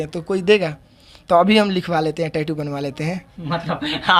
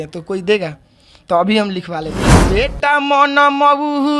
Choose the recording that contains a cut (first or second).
second